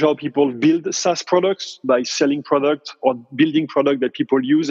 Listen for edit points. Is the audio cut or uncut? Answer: uncut